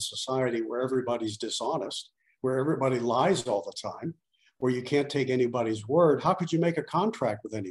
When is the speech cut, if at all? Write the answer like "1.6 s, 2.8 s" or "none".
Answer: none